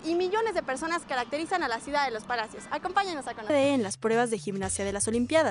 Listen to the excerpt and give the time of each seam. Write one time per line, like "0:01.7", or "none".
none